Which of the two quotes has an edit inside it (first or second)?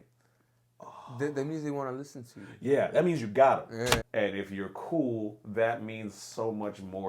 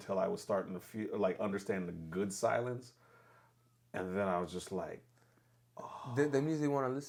first